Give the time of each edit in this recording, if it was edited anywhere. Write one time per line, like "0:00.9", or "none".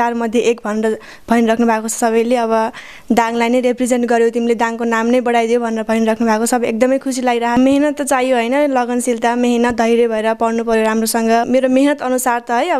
0:07.6
0:11.5